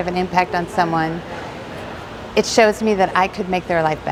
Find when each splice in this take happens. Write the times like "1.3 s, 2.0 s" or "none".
none